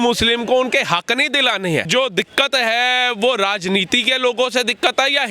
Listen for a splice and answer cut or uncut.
cut